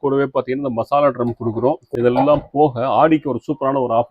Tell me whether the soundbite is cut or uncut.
cut